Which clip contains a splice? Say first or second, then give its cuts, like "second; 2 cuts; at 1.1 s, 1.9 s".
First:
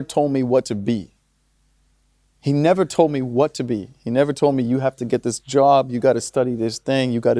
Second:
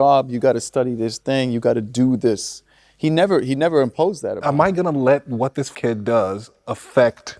second; 2 cuts; at 4.4 s, 5.7 s